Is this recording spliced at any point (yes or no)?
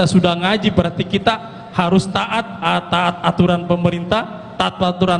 no